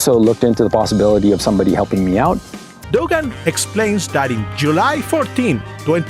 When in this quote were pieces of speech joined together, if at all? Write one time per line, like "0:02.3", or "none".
0:02.8

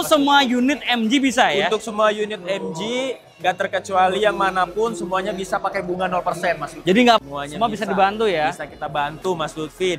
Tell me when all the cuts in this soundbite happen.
0:07.2

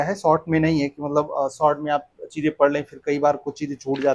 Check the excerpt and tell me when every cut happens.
none

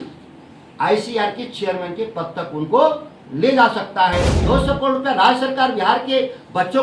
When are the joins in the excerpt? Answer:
0:04.3

